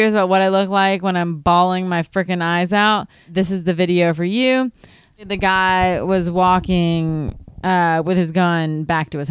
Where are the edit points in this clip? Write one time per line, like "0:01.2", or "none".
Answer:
0:03.2
0:05.3